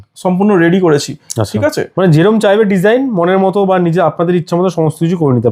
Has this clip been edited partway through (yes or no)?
no